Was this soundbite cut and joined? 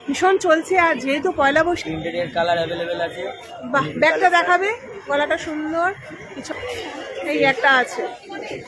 yes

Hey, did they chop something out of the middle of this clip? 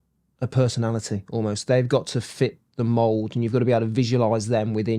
no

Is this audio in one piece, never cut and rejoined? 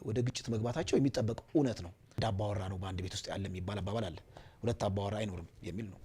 no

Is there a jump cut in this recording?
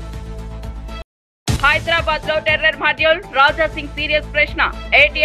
yes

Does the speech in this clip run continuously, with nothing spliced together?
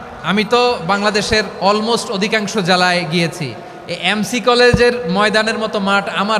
yes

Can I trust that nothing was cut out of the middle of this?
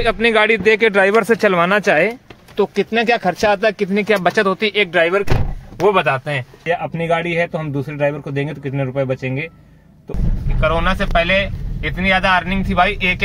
no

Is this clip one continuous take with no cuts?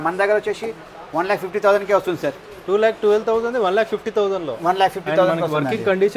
yes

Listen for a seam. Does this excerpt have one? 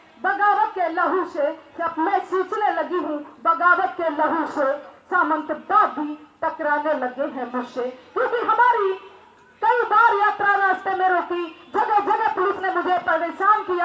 no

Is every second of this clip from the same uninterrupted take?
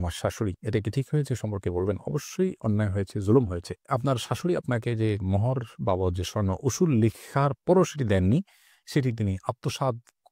yes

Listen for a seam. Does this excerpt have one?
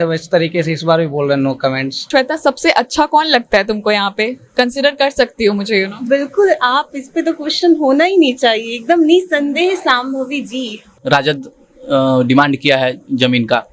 yes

